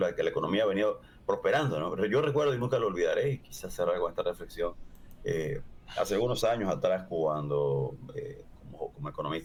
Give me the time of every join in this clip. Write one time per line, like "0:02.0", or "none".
none